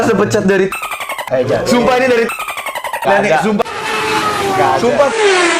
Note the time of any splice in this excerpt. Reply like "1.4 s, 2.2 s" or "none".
none